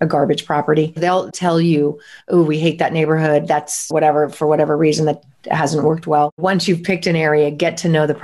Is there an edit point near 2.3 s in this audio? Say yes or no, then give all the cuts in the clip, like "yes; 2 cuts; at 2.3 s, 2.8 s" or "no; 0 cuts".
no; 2 cuts; at 1.0 s, 6.4 s